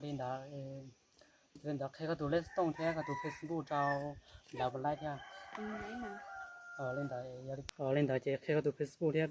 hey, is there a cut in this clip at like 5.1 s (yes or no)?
no